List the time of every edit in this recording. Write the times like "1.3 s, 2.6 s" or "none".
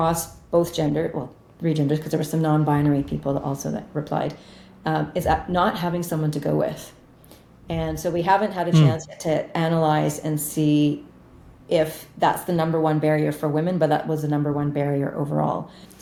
none